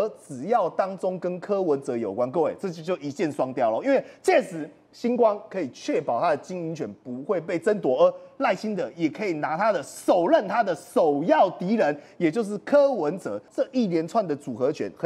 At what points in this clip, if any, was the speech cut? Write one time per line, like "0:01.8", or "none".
0:13.4